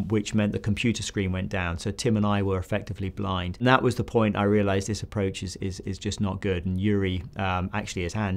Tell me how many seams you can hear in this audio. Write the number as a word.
one